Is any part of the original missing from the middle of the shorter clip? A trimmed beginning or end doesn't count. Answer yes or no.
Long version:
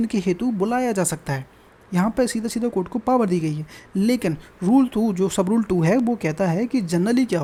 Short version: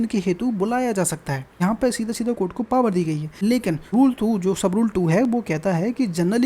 yes